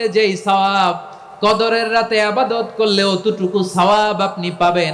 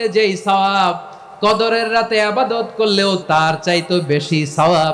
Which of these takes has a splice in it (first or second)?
second